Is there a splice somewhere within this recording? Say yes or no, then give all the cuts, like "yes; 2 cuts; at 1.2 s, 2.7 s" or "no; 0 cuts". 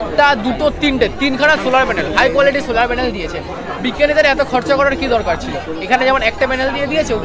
no; 0 cuts